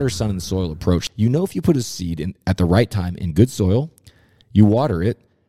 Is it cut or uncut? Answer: cut